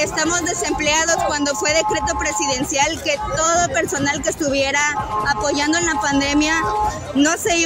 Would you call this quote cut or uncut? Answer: uncut